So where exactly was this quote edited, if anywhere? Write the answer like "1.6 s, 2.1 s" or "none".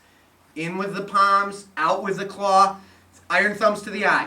none